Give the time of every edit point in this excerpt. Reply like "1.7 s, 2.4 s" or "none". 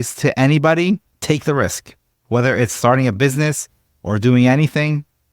1.1 s